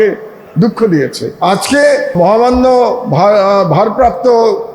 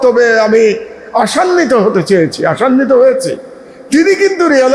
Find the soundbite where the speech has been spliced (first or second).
first